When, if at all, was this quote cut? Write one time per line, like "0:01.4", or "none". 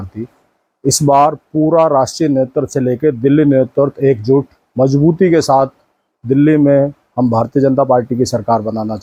none